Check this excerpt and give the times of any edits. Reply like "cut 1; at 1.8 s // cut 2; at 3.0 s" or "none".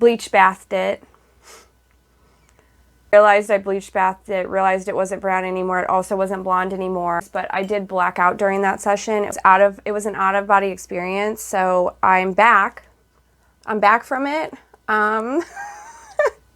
cut 1; at 3.1 s // cut 2; at 7.3 s // cut 3; at 9.3 s